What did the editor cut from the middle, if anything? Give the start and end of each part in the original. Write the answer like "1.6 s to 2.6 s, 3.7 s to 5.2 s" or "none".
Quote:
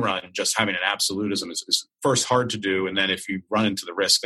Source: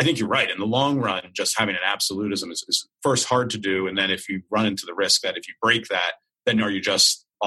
none